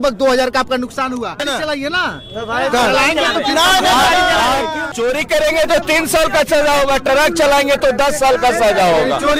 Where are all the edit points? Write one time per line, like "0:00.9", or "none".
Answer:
0:01.4
0:04.8